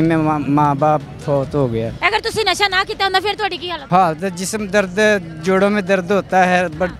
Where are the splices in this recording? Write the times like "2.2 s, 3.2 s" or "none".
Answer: 1.9 s, 3.7 s